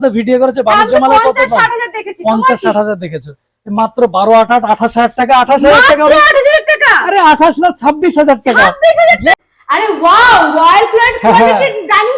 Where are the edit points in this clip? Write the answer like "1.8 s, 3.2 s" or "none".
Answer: 9.3 s